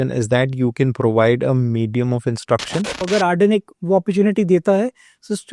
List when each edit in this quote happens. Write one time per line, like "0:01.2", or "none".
0:03.1